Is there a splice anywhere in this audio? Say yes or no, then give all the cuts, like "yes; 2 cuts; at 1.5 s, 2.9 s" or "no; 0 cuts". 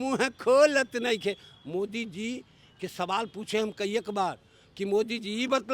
no; 0 cuts